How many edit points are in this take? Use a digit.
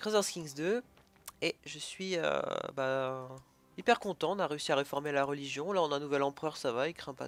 0